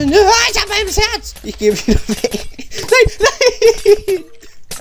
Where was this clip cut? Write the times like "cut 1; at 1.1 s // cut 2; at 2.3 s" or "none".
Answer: none